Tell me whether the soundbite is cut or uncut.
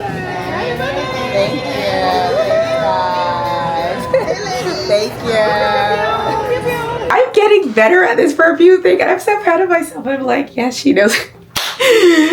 cut